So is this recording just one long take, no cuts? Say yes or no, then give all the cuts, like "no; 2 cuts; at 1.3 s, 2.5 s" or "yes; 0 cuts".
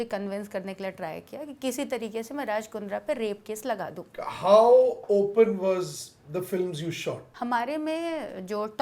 no; 2 cuts; at 4.0 s, 7.3 s